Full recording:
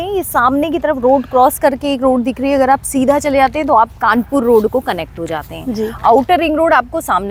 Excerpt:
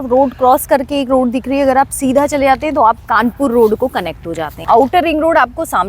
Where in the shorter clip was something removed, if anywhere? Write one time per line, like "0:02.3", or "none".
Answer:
0:04.6